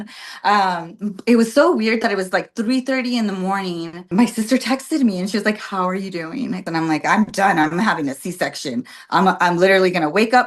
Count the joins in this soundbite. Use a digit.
2